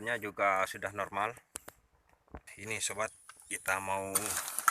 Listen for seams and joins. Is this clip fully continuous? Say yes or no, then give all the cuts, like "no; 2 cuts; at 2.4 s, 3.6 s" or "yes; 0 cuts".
no; 1 cut; at 2.5 s